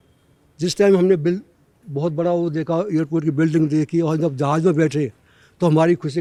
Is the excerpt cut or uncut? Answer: uncut